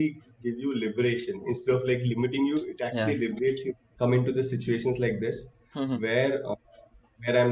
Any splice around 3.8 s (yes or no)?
yes